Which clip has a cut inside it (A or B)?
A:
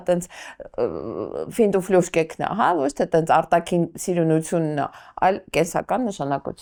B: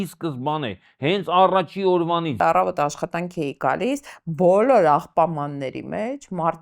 B